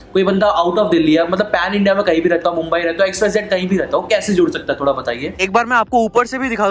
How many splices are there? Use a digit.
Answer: 1